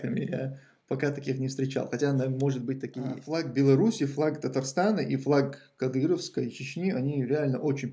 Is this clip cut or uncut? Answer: cut